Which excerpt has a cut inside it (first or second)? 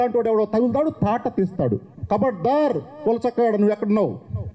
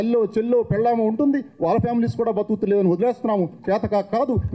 first